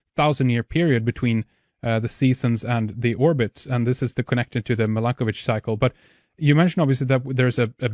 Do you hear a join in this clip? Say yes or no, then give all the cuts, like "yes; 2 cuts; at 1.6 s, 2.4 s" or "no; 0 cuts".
no; 0 cuts